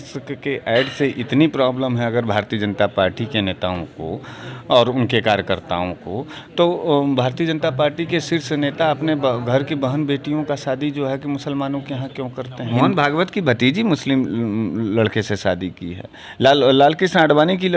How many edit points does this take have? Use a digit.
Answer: 1